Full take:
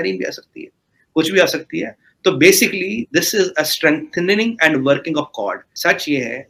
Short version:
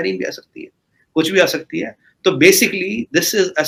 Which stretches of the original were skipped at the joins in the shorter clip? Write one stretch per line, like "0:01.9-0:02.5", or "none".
none